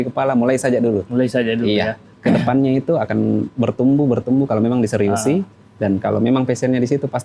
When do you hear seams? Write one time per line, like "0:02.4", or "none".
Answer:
0:02.1